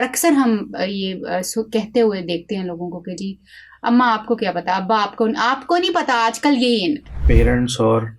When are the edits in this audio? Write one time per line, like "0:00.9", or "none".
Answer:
0:07.1